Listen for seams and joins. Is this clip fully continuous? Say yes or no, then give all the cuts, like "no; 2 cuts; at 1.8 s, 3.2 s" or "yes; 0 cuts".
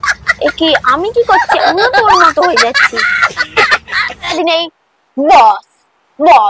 no; 1 cut; at 4.3 s